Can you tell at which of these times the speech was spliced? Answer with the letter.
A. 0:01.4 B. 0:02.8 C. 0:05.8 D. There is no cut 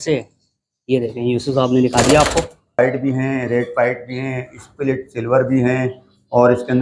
B